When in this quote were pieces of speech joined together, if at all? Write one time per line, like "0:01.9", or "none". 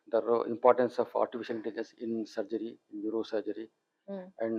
none